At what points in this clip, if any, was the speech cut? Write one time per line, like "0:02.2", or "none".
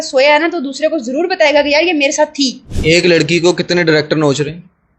0:02.7